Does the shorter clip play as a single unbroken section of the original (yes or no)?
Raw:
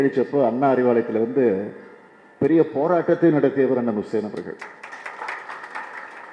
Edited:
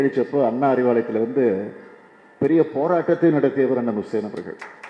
yes